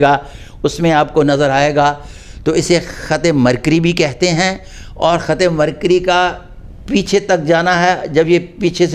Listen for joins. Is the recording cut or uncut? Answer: uncut